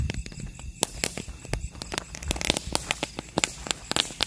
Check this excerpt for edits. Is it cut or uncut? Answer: uncut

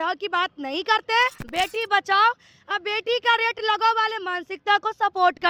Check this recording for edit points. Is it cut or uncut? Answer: cut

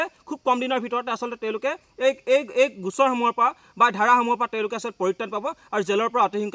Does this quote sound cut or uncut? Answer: uncut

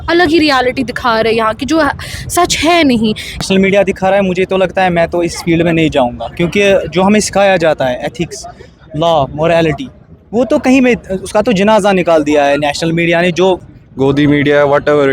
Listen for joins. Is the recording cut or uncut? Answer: cut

